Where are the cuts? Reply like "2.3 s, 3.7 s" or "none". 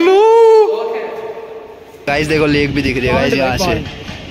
2.1 s